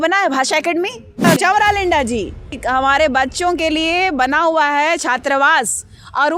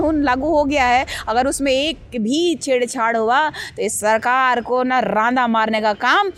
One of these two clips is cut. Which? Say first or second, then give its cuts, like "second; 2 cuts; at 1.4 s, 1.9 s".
first; 2 cuts; at 1.2 s, 2.6 s